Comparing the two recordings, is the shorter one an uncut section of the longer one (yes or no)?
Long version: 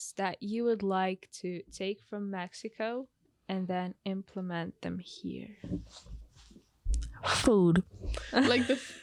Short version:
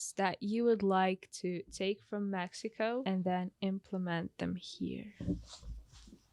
no